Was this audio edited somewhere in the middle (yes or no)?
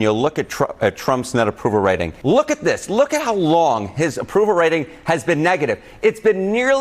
yes